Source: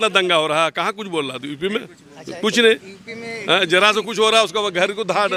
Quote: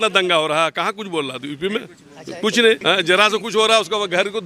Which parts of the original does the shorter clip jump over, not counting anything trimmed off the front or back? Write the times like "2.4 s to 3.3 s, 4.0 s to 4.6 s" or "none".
2.8 s to 3.4 s